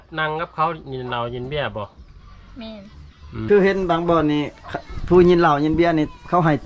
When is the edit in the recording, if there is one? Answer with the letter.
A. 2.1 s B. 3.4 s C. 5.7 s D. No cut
B